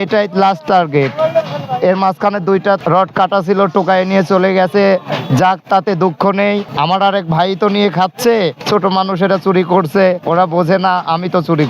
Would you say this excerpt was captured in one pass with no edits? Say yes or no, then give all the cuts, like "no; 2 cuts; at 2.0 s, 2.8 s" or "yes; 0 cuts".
no; 4 cuts; at 2.8 s, 6.7 s, 8.6 s, 10.2 s